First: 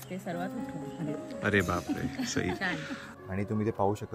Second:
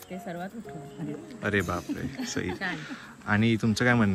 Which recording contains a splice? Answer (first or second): first